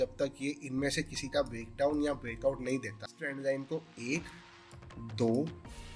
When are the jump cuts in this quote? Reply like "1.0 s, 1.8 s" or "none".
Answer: 3.2 s